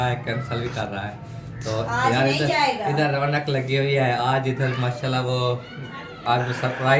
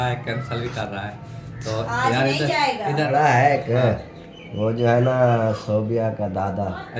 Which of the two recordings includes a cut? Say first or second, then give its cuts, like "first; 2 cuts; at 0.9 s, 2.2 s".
second; 1 cut; at 3.1 s